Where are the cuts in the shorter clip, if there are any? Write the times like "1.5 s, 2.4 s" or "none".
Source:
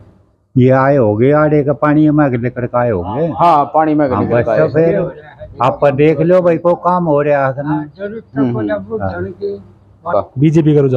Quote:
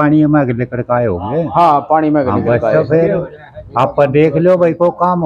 none